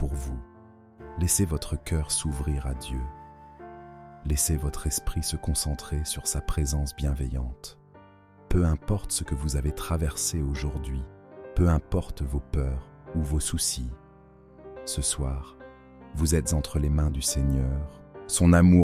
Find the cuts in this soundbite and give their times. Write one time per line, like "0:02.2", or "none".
none